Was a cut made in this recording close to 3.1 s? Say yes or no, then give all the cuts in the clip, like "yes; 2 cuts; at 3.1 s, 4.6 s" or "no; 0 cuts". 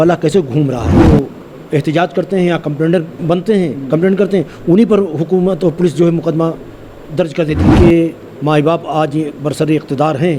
yes; 3 cuts; at 1.0 s, 3.1 s, 7.7 s